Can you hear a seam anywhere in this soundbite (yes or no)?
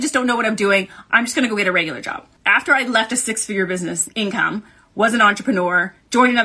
yes